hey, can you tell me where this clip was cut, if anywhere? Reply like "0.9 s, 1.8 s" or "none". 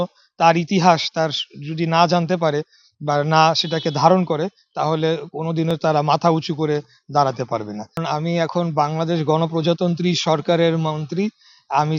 none